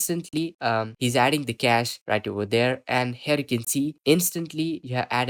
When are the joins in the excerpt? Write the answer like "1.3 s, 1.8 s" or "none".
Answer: none